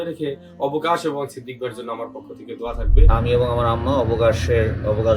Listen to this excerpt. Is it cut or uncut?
cut